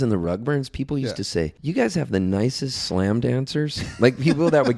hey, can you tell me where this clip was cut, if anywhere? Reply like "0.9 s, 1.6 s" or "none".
1.6 s